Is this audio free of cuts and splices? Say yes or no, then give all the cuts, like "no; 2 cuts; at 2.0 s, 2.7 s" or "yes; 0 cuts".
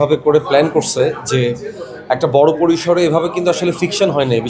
yes; 0 cuts